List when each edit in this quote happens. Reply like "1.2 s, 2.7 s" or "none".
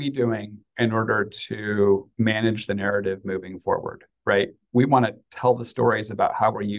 none